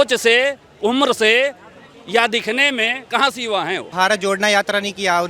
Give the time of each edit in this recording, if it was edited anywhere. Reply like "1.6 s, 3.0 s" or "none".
3.9 s